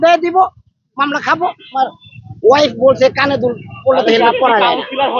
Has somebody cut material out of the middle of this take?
yes; 1 cut; at 1.8 s

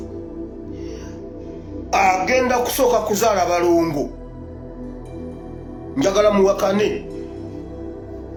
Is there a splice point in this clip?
no; 0 cuts

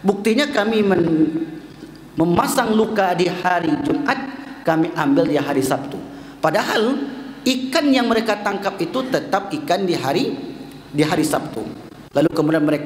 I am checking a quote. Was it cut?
no; 0 cuts

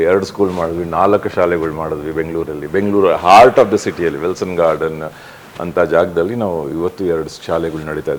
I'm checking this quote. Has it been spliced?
no; 0 cuts

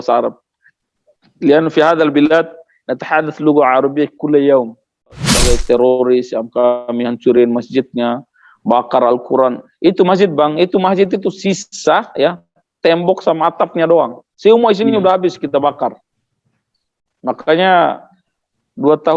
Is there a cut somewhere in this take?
yes; 1 cut; at 5.3 s

